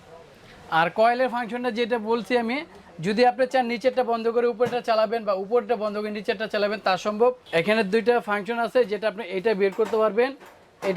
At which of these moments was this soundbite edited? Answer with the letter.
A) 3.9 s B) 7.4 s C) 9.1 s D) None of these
B